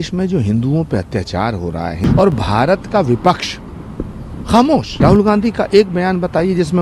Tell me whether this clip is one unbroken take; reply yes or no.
no